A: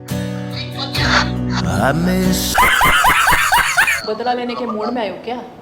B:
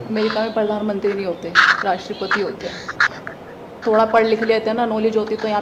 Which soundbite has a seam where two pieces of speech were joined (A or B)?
A